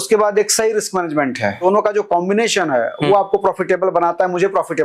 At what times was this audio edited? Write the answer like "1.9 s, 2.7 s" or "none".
1.6 s